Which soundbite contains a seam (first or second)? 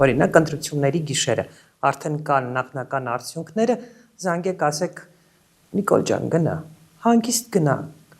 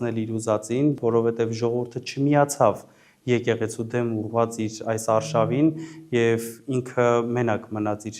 second